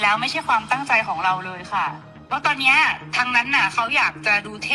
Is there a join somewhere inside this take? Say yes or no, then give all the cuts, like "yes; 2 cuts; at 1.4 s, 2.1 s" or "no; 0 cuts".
yes; 1 cut; at 2.1 s